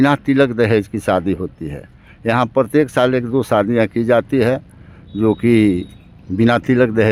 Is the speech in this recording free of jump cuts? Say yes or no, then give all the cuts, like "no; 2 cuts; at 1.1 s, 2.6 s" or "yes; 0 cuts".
yes; 0 cuts